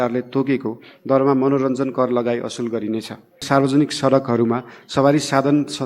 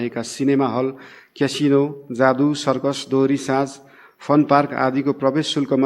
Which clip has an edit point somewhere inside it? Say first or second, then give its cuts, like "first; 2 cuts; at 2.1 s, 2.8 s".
first; 1 cut; at 3.4 s